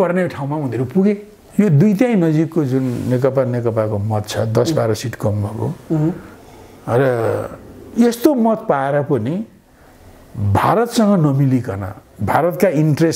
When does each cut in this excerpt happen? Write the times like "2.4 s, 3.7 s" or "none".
1.3 s